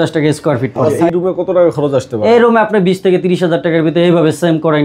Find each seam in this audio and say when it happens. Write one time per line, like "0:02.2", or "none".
0:00.9